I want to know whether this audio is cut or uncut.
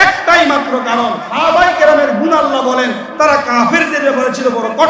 cut